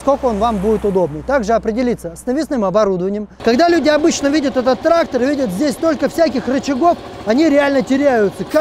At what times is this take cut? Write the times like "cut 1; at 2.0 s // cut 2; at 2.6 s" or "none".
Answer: cut 1; at 3.3 s